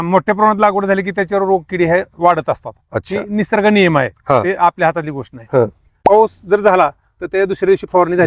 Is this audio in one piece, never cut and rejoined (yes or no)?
no